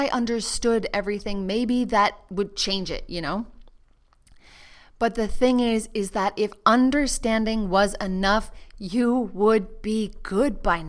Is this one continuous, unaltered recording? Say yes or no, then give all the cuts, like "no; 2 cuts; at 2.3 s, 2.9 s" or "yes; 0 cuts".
yes; 0 cuts